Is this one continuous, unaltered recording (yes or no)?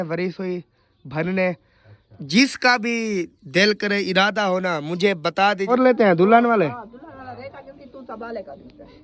no